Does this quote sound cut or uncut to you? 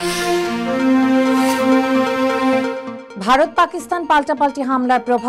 cut